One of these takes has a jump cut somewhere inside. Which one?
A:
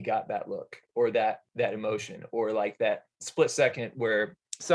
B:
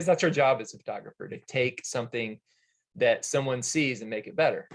A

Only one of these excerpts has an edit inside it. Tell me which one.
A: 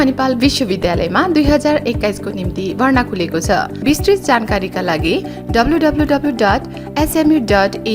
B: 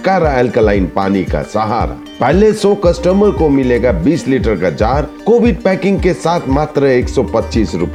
A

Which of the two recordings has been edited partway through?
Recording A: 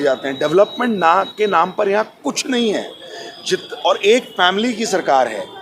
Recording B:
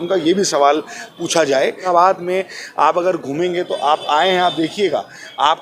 B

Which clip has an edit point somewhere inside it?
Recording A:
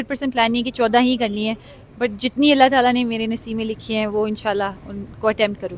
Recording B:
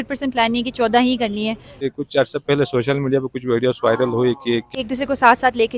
B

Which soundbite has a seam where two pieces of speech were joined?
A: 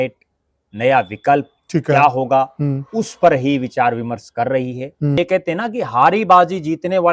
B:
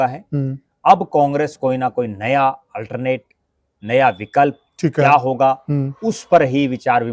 A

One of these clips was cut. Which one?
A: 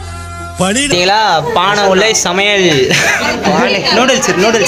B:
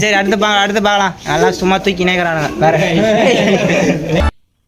A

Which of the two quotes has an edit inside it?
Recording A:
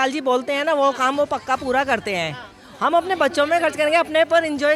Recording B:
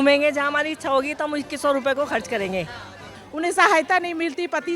B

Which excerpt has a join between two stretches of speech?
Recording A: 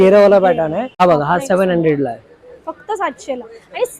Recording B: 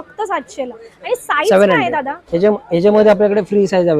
A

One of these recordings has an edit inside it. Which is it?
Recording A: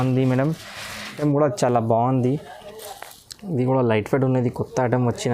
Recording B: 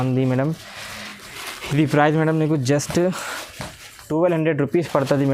A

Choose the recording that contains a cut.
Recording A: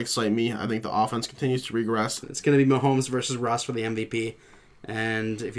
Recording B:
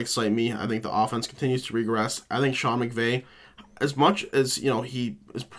A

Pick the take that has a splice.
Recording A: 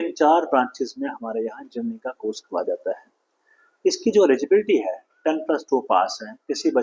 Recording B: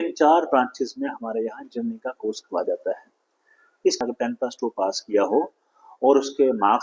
B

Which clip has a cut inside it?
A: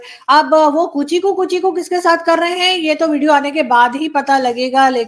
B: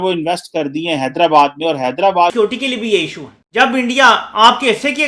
B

